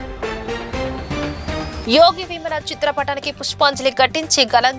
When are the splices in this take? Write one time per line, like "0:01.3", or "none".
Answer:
none